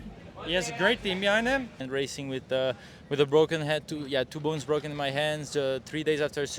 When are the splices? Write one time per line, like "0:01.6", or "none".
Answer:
0:01.8